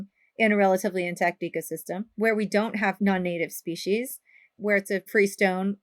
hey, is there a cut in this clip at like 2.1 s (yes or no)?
yes